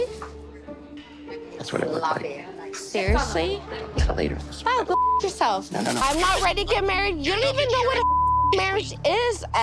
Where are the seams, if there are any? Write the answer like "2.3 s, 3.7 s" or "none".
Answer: 6.0 s